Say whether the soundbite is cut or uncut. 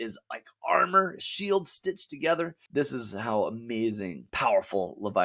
cut